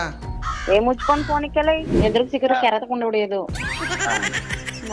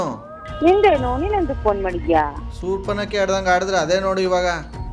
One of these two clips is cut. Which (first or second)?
first